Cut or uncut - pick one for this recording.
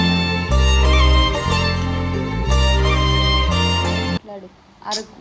uncut